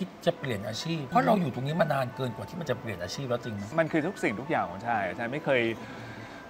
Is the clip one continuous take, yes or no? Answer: no